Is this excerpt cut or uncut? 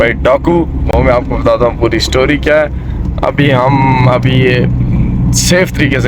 uncut